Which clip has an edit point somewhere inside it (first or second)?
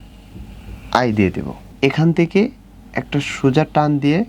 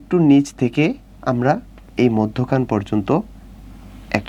first